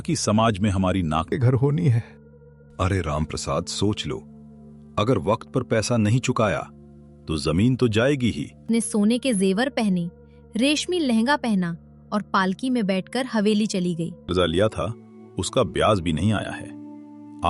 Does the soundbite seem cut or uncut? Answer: cut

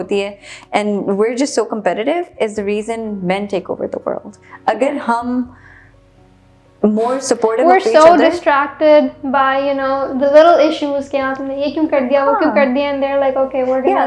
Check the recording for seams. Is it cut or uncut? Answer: uncut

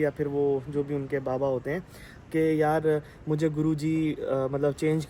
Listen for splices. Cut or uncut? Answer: uncut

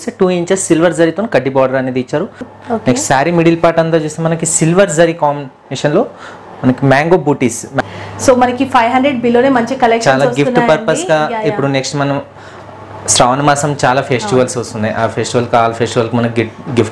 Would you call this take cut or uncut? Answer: cut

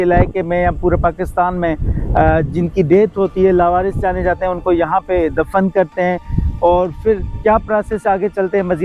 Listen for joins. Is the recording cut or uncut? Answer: uncut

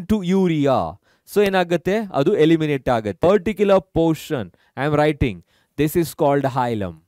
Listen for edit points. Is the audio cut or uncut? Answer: cut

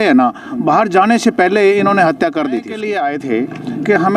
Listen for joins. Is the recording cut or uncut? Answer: cut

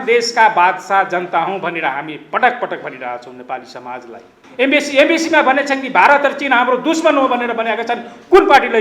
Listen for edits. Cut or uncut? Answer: cut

